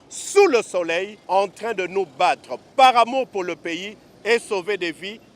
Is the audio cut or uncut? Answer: cut